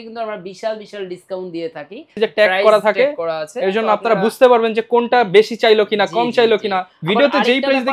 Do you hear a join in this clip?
yes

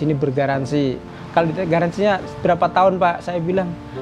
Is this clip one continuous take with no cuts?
no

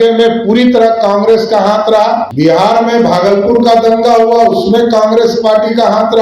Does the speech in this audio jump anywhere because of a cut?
yes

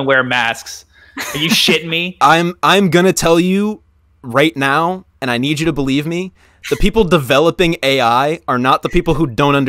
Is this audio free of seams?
yes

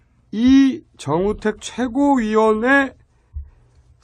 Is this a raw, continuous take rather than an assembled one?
yes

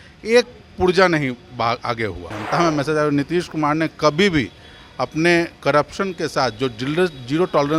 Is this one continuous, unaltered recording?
no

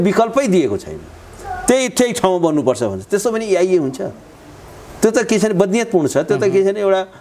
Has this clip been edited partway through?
no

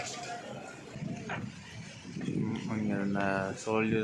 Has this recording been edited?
yes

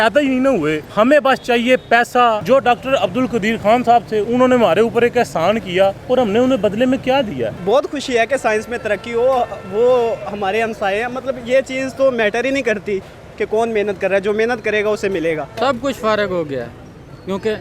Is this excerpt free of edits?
no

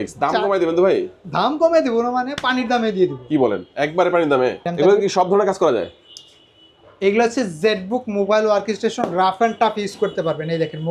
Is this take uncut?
no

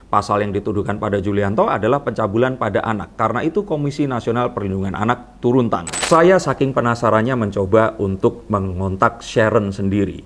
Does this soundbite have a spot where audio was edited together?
yes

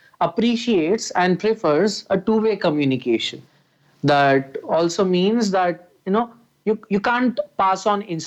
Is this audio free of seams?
yes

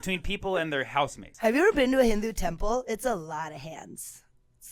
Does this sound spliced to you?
yes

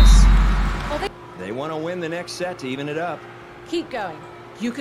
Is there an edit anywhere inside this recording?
yes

